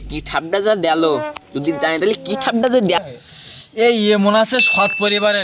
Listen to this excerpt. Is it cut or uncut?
cut